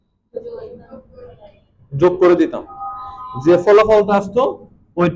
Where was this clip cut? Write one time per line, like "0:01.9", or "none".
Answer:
none